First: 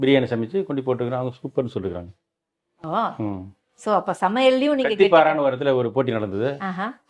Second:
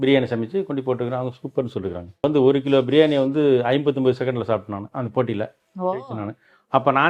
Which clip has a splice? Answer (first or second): second